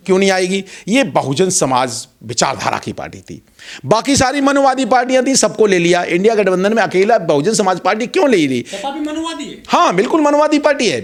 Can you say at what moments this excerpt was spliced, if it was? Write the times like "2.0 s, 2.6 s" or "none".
none